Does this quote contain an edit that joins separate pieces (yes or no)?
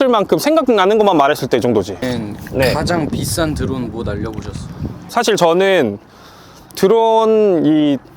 yes